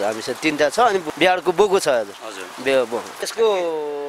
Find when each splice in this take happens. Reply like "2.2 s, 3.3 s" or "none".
1.0 s, 3.2 s